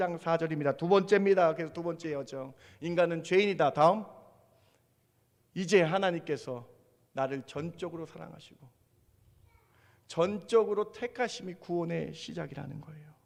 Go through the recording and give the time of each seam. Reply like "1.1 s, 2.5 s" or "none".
none